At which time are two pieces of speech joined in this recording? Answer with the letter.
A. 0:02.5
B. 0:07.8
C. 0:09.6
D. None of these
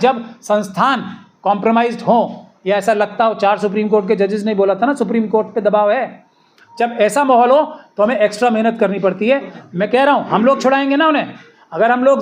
C